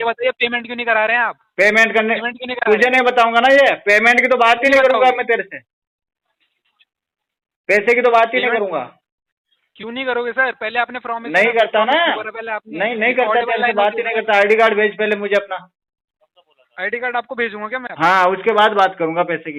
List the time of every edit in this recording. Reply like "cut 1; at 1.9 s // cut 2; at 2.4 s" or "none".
none